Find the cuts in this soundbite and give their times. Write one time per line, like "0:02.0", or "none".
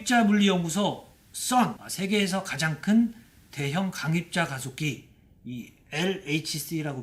0:01.8